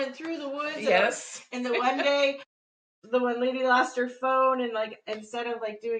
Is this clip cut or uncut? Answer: uncut